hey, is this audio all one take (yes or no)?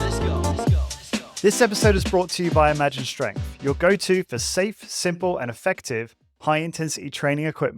no